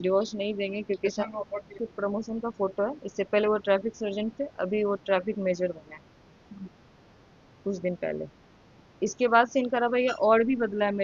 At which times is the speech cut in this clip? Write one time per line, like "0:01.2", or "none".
0:01.8